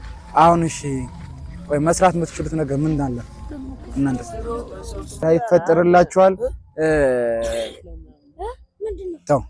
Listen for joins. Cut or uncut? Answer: cut